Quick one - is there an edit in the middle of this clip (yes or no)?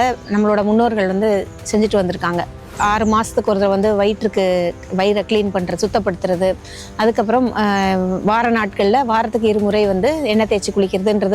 yes